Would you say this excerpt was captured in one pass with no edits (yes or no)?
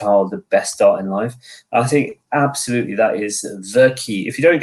yes